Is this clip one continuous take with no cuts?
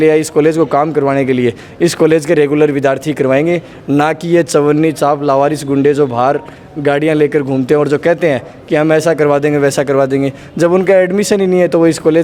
yes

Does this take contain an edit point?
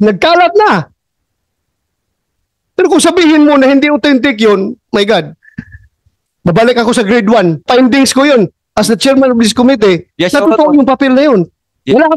yes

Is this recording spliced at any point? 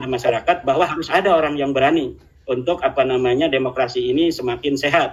no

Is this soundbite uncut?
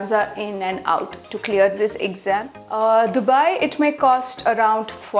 no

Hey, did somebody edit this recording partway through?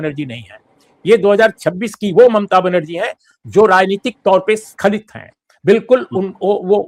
no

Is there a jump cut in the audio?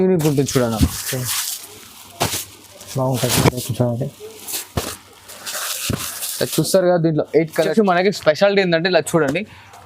yes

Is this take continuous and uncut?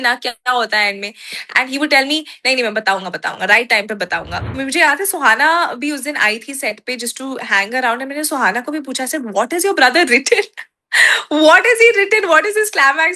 no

